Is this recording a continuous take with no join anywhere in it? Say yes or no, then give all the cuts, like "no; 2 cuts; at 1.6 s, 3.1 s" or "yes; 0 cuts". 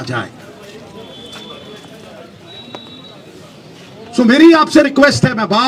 yes; 0 cuts